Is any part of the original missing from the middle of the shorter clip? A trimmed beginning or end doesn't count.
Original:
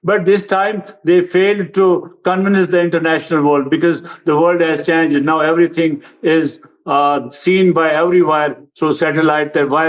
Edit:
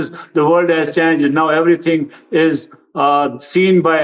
no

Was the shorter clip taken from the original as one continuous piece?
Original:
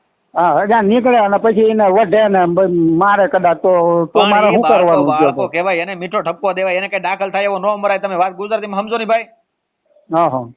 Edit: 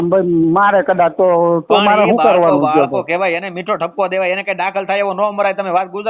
yes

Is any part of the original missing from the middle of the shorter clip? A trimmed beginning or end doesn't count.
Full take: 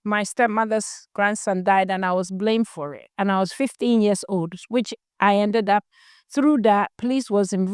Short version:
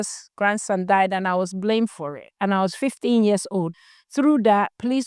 yes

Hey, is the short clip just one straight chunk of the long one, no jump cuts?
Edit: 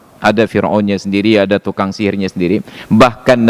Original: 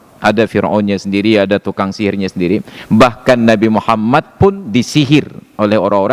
yes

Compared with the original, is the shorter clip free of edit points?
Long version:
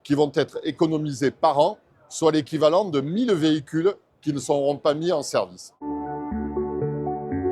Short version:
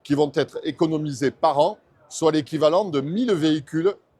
yes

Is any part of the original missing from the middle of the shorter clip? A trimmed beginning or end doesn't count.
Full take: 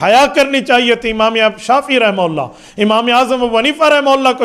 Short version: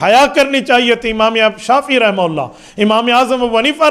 no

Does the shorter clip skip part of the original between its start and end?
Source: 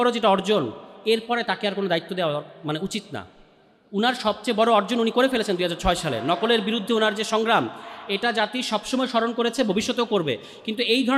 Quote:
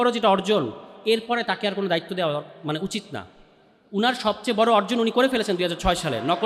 no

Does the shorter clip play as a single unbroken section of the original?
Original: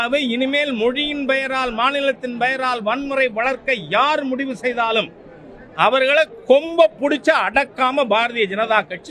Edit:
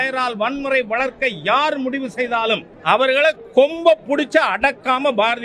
no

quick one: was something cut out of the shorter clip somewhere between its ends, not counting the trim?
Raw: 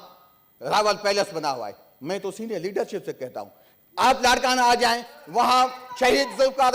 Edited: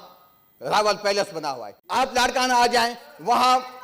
yes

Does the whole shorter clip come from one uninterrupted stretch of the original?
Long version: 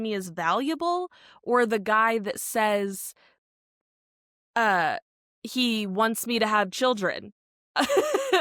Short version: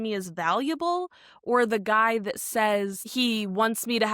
no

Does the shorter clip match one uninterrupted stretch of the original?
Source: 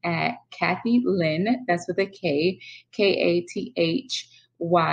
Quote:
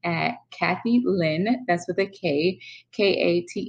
yes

